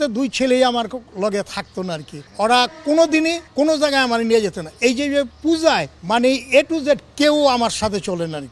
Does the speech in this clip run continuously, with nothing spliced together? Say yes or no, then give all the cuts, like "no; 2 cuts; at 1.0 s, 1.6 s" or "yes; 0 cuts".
no; 4 cuts; at 2.2 s, 3.4 s, 5.3 s, 5.9 s